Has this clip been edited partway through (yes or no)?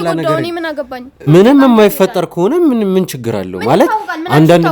yes